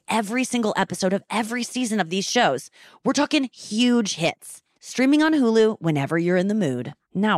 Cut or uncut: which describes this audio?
uncut